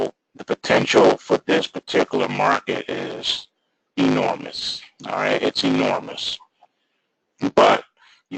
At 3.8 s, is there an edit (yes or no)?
no